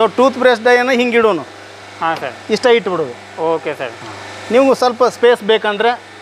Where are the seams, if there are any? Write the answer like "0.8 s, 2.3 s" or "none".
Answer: none